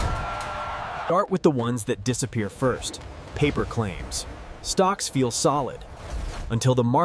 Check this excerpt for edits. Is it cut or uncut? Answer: cut